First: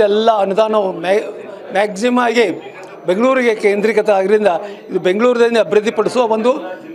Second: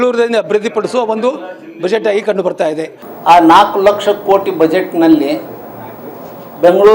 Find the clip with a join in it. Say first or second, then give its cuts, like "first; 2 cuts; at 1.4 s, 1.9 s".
second; 1 cut; at 2.9 s